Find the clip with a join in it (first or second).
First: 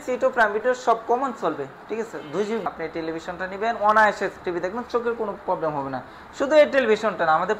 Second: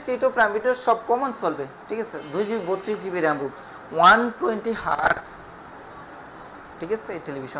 first